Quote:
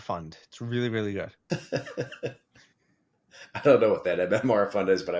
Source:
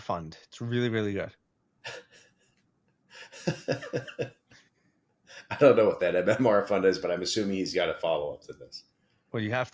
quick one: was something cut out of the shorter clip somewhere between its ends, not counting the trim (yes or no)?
yes